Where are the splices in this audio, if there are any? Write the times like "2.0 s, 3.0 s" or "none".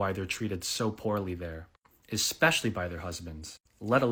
none

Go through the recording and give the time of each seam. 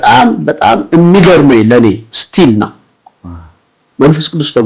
none

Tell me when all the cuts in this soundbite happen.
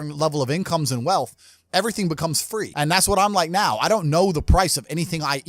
2.7 s

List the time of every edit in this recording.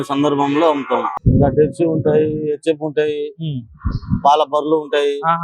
1.1 s

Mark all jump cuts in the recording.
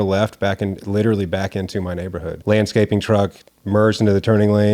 2.3 s

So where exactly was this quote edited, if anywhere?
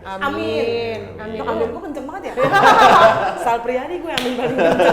none

